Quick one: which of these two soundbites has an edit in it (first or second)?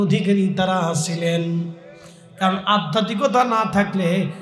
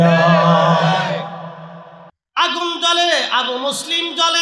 second